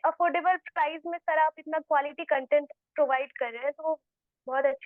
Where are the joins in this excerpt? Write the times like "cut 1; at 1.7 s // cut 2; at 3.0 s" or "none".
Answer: none